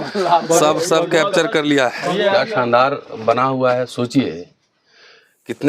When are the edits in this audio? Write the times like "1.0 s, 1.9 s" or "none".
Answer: 2.3 s